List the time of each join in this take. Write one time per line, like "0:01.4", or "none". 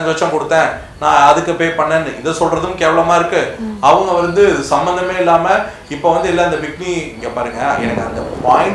none